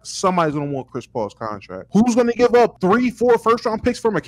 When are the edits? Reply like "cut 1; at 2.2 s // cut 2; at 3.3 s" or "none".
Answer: cut 1; at 1.7 s // cut 2; at 2.8 s